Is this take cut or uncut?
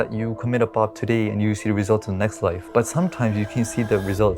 cut